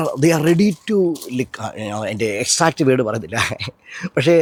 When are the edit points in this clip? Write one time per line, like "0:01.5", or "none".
none